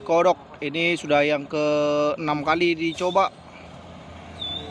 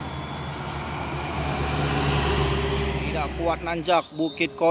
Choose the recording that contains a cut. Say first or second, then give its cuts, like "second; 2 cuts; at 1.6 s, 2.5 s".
second; 1 cut; at 3.3 s